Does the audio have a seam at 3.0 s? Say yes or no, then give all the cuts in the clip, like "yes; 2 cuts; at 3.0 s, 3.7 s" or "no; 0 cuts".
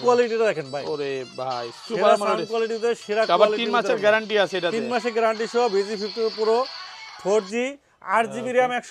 no; 0 cuts